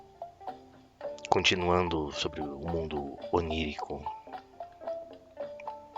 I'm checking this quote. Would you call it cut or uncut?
cut